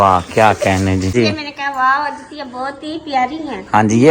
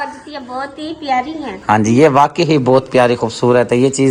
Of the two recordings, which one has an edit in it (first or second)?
first